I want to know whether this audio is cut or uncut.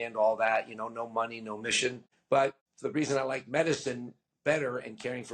cut